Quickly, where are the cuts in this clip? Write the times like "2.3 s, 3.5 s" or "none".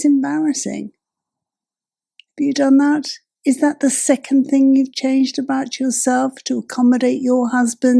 none